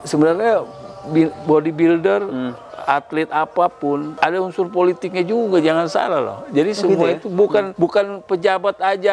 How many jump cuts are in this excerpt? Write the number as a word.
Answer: two